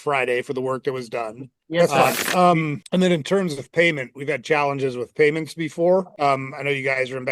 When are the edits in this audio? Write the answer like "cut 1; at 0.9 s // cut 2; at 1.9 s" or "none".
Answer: cut 1; at 1.8 s